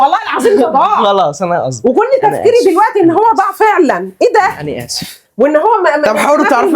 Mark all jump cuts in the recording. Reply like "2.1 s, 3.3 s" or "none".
none